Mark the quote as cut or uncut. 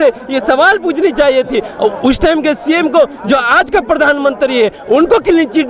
uncut